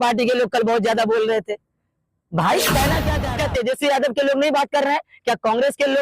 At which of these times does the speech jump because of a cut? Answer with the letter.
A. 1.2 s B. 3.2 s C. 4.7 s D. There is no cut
B